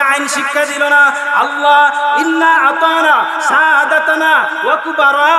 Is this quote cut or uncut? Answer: uncut